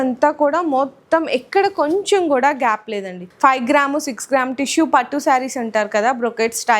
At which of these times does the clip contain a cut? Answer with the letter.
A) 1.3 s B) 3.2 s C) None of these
B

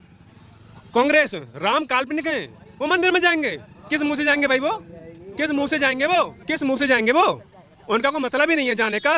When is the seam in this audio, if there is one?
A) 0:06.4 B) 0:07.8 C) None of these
A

